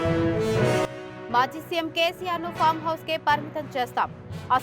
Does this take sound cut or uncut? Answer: uncut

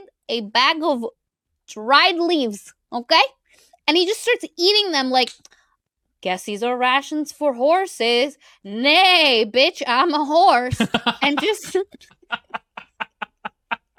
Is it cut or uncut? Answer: uncut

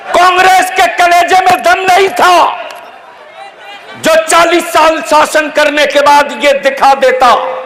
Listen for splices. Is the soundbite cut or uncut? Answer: uncut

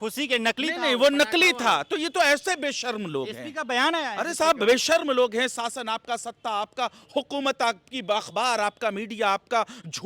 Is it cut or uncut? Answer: uncut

